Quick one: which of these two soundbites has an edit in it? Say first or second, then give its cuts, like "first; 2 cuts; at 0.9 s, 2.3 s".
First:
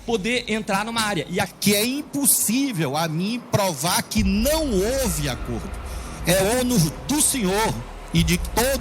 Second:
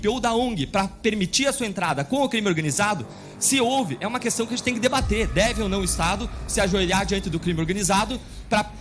first; 1 cut; at 1.5 s